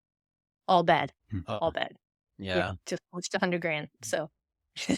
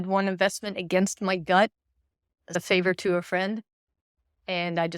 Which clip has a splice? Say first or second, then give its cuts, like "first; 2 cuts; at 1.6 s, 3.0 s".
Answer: second; 1 cut; at 2.6 s